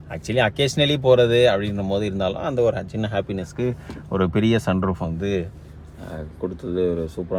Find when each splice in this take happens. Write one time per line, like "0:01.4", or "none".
none